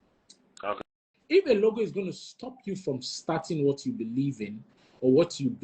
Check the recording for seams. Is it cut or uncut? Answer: cut